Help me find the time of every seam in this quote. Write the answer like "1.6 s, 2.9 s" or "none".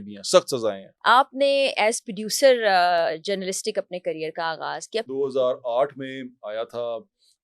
0.9 s, 5.1 s